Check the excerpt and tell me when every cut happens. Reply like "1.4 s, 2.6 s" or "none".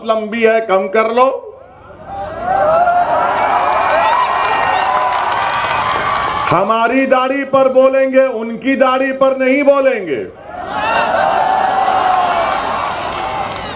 none